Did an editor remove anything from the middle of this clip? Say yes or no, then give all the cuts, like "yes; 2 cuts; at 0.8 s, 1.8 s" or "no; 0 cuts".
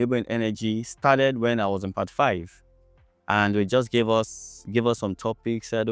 no; 0 cuts